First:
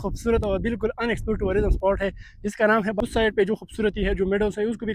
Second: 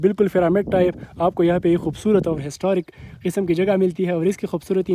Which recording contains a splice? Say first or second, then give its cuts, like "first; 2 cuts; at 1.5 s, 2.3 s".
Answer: first; 1 cut; at 3.0 s